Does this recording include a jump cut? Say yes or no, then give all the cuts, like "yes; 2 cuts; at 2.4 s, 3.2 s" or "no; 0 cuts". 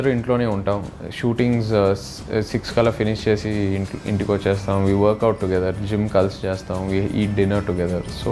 no; 0 cuts